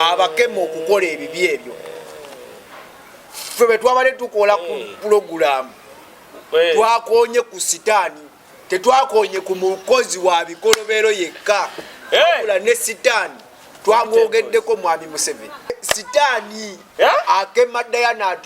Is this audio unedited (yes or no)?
no